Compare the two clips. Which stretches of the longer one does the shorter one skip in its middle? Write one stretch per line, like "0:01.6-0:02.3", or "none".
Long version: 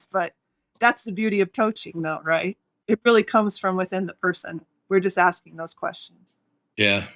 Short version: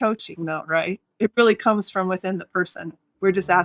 0:02.6-0:02.7

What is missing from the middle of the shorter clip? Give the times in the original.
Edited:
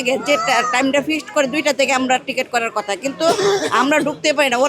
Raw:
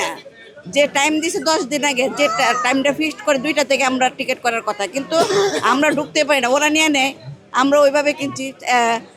none

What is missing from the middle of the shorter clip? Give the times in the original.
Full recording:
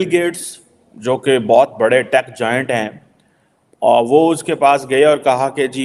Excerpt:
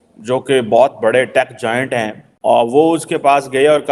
0:03.4-0:04.0

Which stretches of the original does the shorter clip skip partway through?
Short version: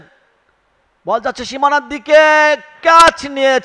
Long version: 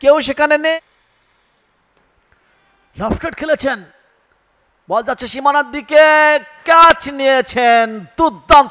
none

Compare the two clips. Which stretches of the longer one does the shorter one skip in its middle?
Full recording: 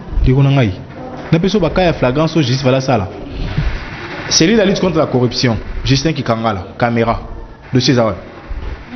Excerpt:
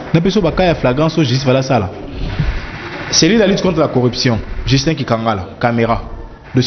none

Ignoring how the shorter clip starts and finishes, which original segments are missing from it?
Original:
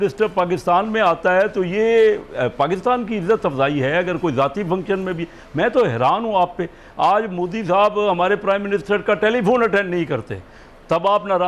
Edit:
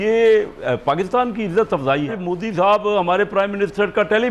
0:03.8-0:07.2

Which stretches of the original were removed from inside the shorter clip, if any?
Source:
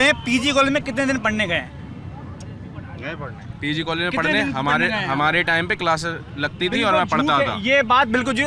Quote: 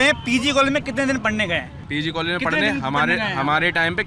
0:01.8-0:03.5

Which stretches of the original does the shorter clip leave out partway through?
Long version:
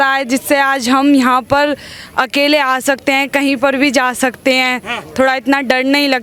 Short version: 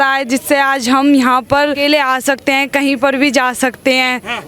0:01.8-0:02.4

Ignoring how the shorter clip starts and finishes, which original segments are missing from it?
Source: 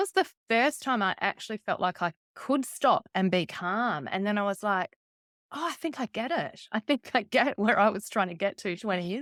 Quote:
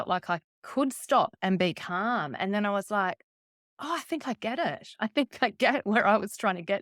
none

